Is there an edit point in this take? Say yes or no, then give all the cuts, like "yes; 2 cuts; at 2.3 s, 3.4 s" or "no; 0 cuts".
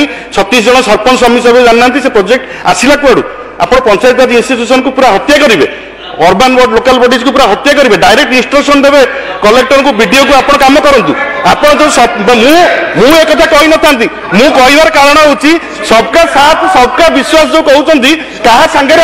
no; 0 cuts